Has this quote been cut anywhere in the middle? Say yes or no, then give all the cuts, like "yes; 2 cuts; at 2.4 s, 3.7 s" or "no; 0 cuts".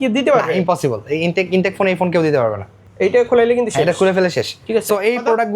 no; 0 cuts